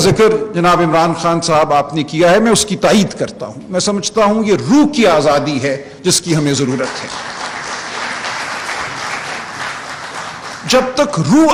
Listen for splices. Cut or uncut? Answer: uncut